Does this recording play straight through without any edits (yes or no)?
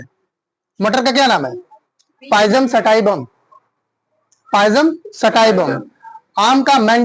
yes